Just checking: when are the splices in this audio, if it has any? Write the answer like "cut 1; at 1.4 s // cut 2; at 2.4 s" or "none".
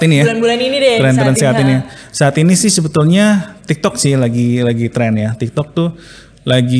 none